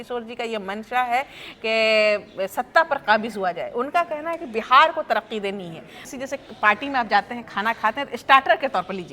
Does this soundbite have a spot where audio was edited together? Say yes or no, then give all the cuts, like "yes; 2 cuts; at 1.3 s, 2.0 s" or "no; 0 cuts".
yes; 1 cut; at 6.0 s